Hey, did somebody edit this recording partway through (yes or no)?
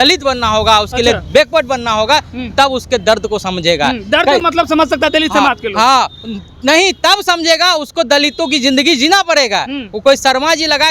no